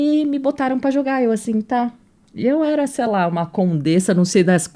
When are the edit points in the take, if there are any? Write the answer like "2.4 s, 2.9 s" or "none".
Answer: none